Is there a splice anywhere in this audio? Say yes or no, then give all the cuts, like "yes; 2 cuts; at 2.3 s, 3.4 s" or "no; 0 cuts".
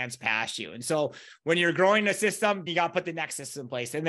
yes; 1 cut; at 2.7 s